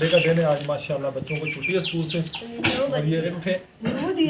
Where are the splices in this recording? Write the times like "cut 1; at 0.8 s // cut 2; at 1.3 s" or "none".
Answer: cut 1; at 3.3 s

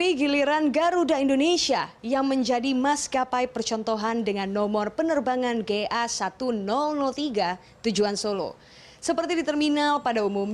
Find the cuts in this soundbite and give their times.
cut 1; at 1.9 s

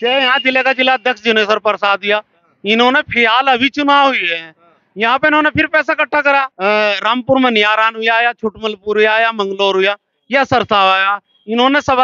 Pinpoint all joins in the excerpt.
cut 1; at 6.5 s

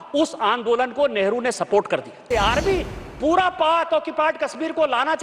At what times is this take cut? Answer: cut 1; at 2.3 s

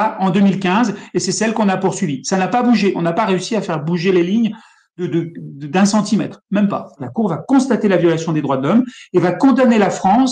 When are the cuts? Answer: cut 1; at 7.0 s

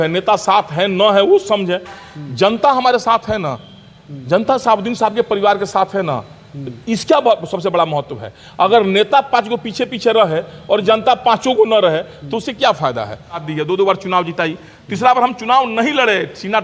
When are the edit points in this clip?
cut 1; at 13.5 s

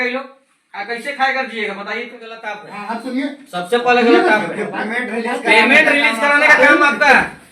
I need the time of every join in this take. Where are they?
cut 1; at 2.7 s

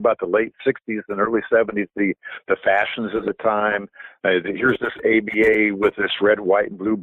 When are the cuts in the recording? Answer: none

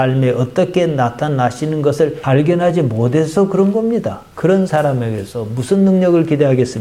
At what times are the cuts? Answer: cut 1; at 4.2 s

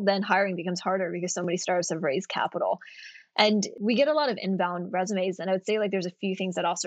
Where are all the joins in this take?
cut 1; at 3.7 s

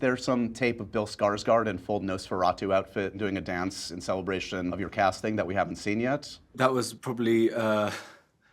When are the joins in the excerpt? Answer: cut 1; at 3.2 s // cut 2; at 4.7 s // cut 3; at 6.4 s

